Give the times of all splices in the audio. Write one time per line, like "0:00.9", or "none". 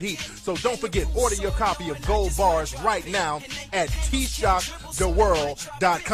0:03.4